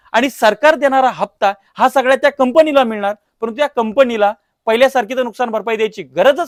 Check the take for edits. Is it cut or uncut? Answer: uncut